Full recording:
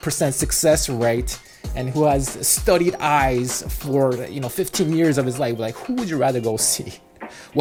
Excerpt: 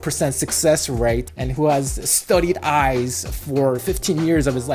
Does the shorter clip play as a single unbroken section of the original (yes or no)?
no